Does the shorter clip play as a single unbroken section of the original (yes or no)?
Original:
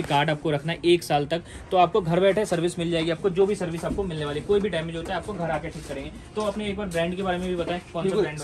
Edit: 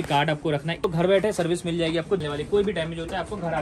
no